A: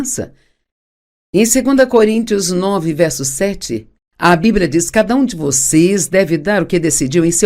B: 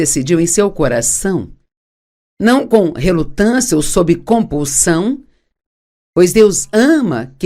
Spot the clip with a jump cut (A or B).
A